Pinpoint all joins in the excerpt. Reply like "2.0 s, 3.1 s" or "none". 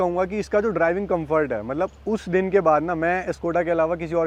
none